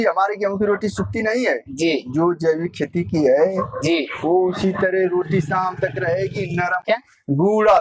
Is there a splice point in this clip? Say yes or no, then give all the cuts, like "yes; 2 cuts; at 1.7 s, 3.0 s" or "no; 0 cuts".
yes; 1 cut; at 6.8 s